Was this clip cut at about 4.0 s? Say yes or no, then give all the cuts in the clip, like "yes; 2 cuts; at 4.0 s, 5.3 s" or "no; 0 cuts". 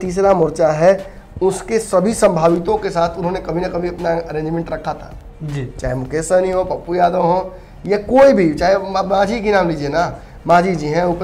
no; 0 cuts